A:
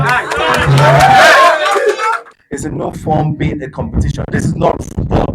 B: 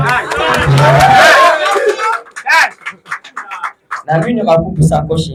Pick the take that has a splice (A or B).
A